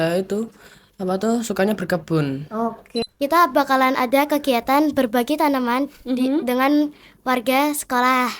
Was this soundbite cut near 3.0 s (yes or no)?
yes